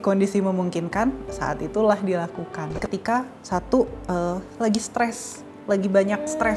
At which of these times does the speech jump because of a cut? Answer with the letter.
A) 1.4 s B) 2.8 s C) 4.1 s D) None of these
B